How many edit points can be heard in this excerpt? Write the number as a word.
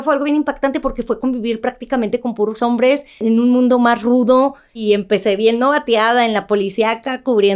two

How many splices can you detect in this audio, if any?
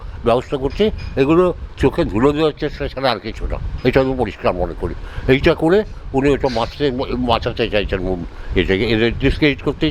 zero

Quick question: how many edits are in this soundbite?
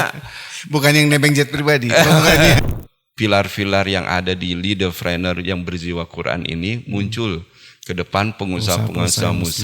one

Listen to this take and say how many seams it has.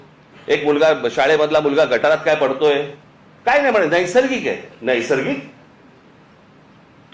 zero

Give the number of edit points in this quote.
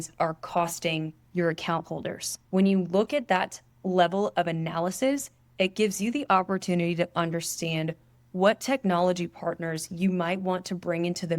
two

